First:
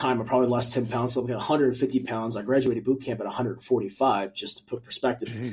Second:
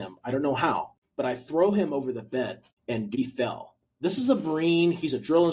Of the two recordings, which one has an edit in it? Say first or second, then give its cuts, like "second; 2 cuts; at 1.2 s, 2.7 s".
second; 2 cuts; at 1.0 s, 3.1 s